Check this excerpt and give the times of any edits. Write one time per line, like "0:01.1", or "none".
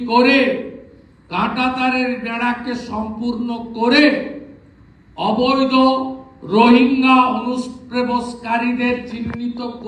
none